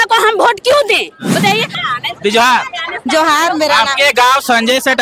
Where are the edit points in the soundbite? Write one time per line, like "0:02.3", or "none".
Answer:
0:01.8